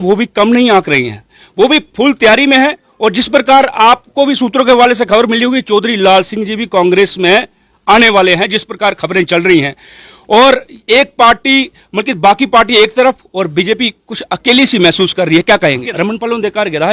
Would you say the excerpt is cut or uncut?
cut